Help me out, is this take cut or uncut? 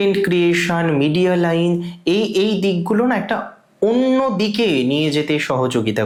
uncut